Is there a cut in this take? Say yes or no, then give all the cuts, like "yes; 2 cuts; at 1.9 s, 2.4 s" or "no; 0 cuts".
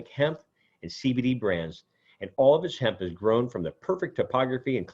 no; 0 cuts